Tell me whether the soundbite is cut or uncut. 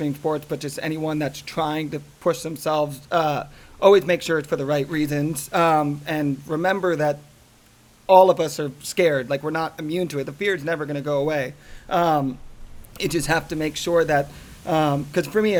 uncut